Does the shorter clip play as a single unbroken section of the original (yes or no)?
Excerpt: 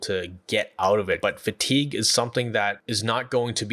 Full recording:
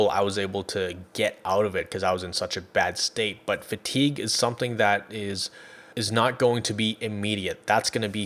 no